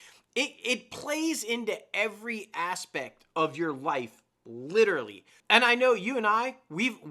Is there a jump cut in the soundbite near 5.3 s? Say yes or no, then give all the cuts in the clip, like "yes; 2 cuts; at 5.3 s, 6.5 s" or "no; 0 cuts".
yes; 1 cut; at 5.3 s